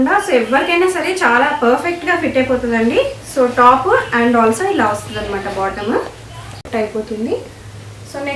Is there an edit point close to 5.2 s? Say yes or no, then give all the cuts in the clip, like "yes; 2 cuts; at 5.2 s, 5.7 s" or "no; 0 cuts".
no; 1 cut; at 6.7 s